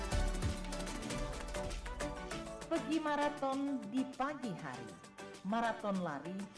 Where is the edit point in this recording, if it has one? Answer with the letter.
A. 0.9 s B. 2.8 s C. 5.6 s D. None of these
A